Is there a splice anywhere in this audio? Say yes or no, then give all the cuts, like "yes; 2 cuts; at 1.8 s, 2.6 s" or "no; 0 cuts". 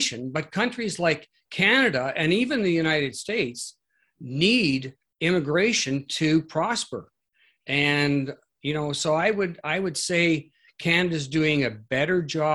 no; 0 cuts